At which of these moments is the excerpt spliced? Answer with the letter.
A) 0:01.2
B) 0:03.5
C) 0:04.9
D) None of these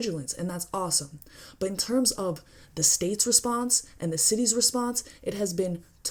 D